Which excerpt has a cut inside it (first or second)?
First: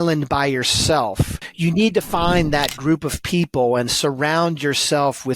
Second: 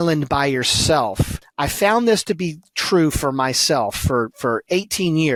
first